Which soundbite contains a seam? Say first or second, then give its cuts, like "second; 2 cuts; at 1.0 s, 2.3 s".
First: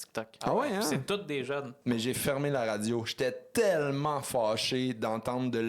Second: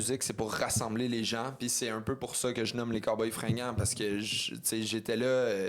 first; 1 cut; at 1.7 s